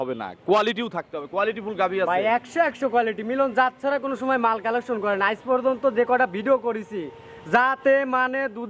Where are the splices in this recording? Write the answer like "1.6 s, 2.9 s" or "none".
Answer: none